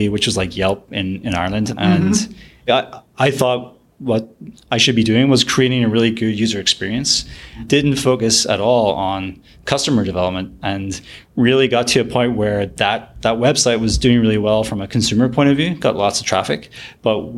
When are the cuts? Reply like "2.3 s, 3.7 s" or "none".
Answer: 1.7 s, 2.7 s, 7.6 s